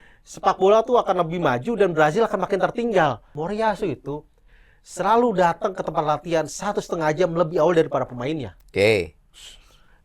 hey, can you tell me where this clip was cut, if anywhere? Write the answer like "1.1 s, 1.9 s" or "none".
3.3 s